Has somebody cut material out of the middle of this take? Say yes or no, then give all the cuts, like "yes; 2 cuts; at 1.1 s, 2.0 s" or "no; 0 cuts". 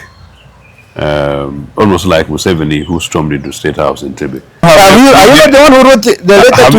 yes; 1 cut; at 4.6 s